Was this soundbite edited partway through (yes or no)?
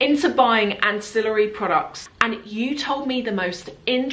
yes